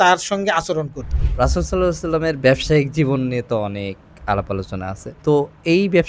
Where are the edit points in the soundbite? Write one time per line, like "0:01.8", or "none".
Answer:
0:01.2
0:05.0